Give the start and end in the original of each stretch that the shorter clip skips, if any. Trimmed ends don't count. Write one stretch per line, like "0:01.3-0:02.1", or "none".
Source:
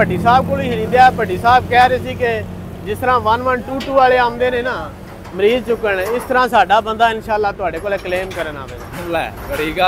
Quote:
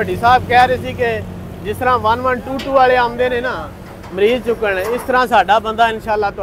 none